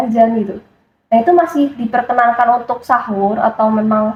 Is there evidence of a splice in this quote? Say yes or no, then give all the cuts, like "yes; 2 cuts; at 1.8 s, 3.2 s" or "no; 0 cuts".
no; 0 cuts